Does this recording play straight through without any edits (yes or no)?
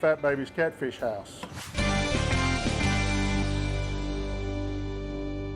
no